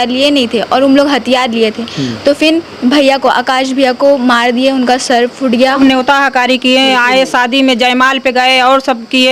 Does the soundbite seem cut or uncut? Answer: cut